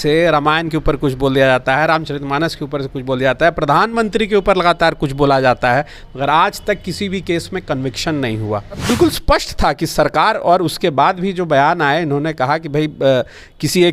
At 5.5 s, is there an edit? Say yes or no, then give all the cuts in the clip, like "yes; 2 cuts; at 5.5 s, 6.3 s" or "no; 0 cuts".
no; 1 cut; at 8.8 s